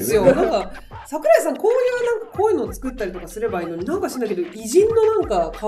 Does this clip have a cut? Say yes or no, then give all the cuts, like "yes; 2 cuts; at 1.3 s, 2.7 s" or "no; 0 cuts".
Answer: no; 0 cuts